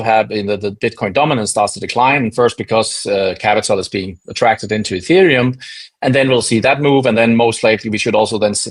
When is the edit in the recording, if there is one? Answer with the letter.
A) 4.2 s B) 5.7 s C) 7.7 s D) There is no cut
D